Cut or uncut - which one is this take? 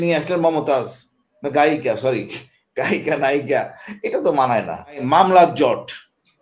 cut